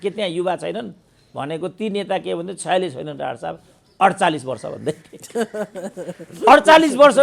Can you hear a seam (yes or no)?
no